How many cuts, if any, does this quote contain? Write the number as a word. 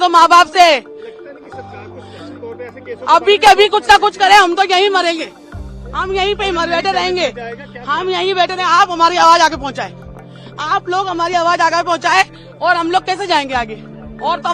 zero